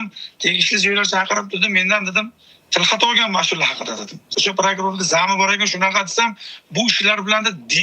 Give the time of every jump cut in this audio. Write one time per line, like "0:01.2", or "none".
0:04.3